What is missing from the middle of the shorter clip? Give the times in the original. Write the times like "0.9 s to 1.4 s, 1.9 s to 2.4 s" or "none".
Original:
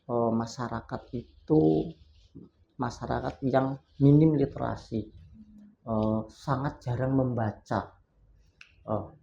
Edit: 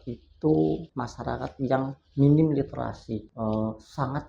2.0 s to 2.8 s, 5.1 s to 5.8 s